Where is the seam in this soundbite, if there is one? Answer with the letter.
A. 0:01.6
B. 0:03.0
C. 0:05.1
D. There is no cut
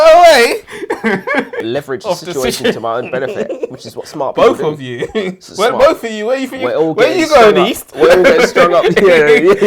A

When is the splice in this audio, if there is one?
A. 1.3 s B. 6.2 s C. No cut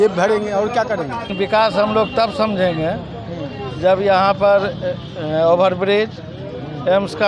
A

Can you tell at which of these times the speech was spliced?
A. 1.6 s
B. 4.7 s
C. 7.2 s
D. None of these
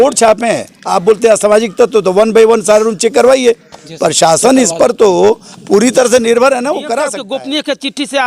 C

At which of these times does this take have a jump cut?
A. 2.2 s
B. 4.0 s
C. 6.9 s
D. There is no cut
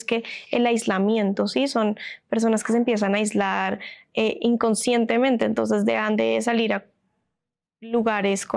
D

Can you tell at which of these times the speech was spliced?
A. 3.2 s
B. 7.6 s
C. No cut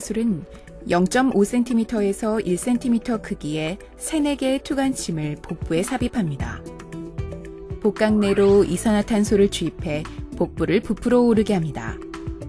C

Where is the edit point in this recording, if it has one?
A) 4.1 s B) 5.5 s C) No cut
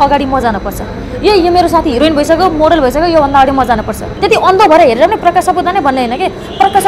A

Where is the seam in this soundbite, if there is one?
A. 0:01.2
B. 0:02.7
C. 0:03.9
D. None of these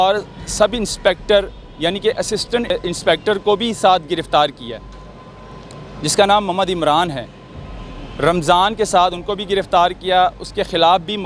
B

